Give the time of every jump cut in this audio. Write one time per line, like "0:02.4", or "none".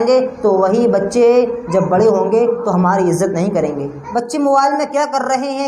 0:04.0

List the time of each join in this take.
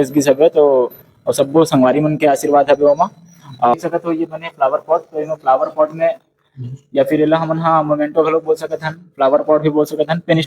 0:03.7

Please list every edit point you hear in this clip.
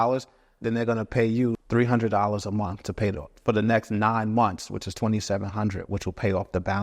0:01.6

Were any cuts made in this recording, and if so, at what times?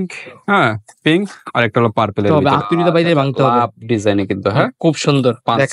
0:02.3

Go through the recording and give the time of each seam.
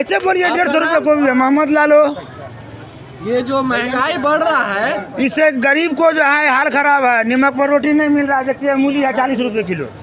none

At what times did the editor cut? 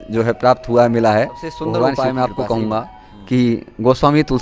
0:01.9

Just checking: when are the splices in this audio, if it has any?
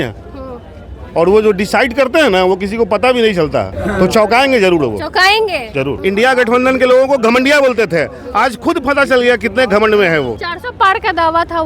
0:03.7
0:05.9
0:10.5

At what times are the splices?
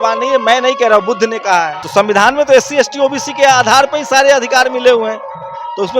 0:01.8

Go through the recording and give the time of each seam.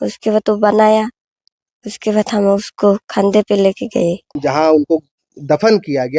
0:04.3

